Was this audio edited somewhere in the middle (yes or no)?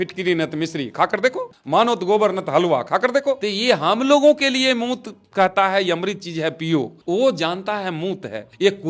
yes